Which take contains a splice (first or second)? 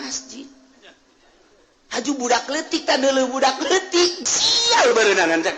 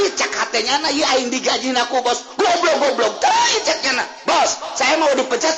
first